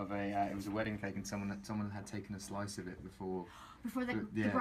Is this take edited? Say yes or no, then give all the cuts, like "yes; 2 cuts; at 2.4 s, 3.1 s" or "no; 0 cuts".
no; 0 cuts